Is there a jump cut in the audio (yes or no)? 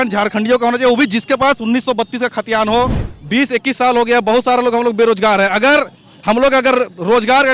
yes